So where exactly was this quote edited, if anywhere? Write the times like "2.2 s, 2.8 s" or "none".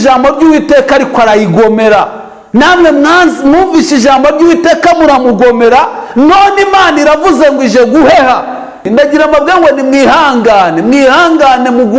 8.9 s